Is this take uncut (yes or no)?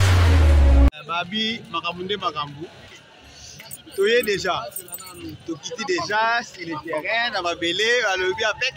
no